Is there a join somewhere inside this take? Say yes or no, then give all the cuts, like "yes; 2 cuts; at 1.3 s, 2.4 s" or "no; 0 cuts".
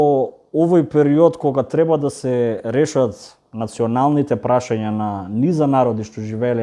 no; 0 cuts